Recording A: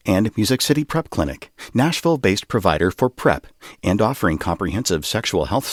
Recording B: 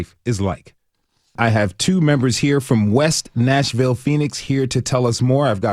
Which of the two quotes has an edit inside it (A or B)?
B